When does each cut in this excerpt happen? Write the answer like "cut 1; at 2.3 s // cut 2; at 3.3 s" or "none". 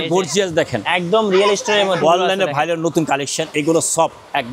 cut 1; at 2.0 s